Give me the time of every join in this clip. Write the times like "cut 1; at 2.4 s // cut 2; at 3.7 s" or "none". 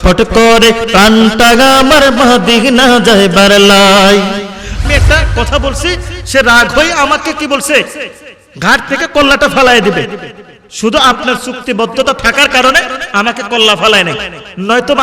cut 1; at 4.8 s